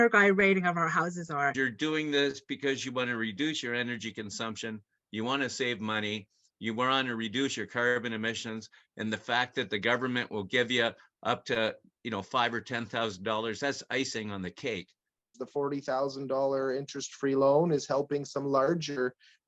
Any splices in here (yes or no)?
yes